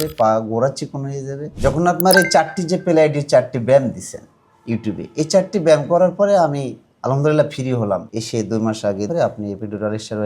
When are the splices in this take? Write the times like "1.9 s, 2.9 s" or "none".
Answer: 1.5 s, 8.1 s, 9.1 s